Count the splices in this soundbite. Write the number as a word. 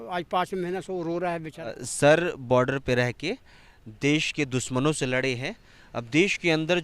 one